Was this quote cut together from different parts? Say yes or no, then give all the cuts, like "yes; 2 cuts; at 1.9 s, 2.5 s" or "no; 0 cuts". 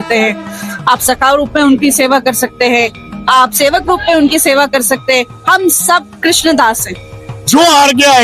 yes; 1 cut; at 7.2 s